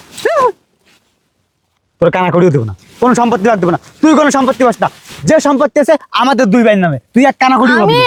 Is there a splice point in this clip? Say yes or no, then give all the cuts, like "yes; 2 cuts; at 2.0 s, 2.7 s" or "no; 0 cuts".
no; 0 cuts